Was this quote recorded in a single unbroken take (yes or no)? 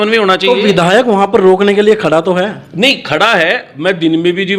yes